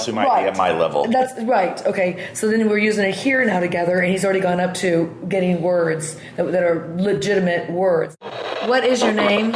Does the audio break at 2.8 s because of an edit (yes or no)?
no